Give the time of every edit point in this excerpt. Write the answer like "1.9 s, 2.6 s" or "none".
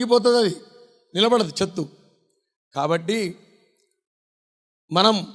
none